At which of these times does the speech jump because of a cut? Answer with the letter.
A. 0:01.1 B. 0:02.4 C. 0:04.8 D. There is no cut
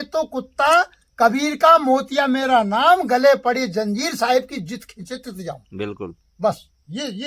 D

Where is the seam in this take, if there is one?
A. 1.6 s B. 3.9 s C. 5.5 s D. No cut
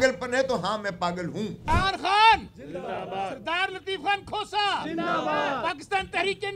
A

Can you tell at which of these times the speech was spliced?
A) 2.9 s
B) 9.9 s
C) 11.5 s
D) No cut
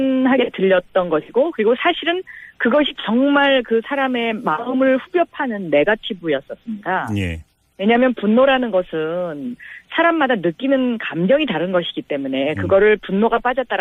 D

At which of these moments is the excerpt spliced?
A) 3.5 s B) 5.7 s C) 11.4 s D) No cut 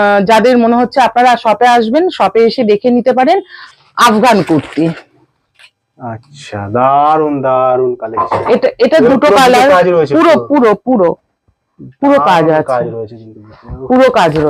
A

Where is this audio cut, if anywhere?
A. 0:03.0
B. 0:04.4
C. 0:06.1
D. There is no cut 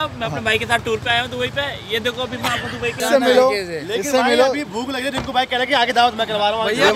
A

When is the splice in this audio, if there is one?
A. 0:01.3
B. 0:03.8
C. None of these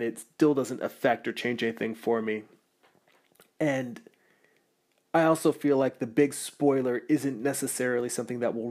A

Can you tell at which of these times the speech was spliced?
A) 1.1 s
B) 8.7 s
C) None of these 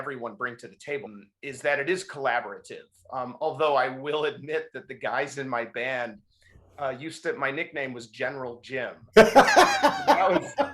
A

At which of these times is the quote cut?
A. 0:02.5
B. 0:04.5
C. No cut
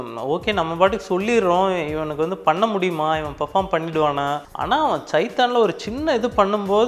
B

